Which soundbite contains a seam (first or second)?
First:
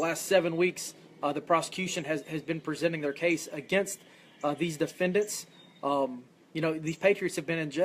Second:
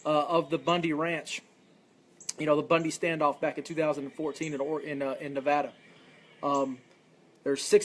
first